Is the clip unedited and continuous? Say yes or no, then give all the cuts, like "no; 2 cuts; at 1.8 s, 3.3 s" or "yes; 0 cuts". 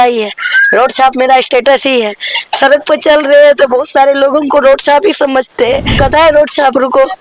no; 1 cut; at 6.0 s